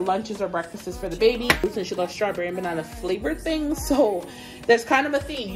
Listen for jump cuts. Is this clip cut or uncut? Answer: cut